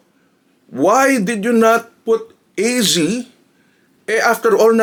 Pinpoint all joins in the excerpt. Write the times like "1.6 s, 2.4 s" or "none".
none